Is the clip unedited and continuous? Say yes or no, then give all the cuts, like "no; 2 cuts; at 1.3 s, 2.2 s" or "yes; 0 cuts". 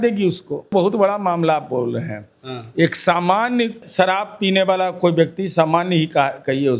no; 2 cuts; at 0.7 s, 3.8 s